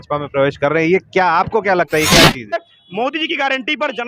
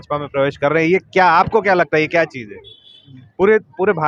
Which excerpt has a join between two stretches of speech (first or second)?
first